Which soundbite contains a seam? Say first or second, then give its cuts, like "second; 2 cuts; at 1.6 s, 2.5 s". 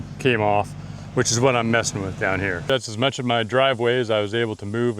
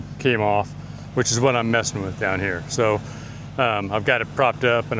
first; 1 cut; at 2.7 s